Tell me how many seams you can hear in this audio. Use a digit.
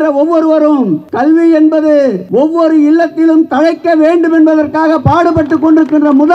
2